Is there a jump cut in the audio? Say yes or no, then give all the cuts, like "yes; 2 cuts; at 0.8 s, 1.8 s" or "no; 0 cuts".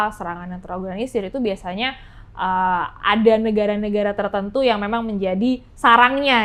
no; 0 cuts